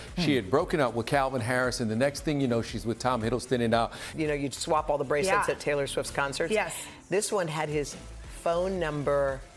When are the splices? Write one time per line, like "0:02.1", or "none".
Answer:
0:04.0